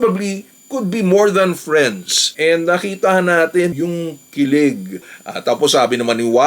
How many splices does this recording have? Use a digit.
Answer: 2